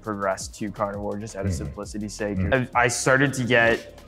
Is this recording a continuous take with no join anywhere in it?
no; 1 cut; at 2.5 s

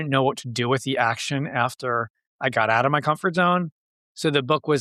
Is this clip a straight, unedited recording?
yes; 0 cuts

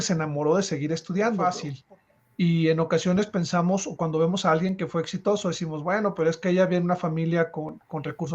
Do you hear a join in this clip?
yes; 1 cut; at 1.7 s

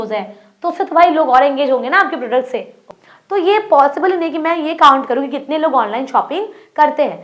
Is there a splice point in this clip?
yes; 1 cut; at 2.9 s

